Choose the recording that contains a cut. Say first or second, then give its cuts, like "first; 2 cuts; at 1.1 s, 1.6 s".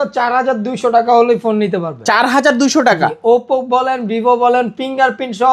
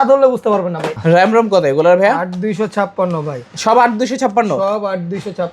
second; 1 cut; at 0.9 s